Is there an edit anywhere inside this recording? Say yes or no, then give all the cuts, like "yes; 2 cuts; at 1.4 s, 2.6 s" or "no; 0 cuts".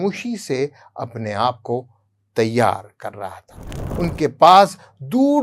yes; 1 cut; at 3.9 s